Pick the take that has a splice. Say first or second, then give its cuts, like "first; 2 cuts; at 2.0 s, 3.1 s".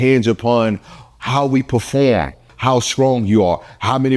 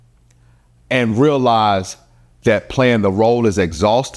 first; 1 cut; at 2.5 s